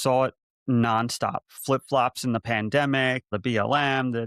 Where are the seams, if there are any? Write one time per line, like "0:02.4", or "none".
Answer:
0:03.3